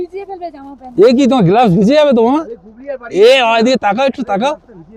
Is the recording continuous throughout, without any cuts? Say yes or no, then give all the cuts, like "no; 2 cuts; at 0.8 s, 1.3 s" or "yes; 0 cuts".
yes; 0 cuts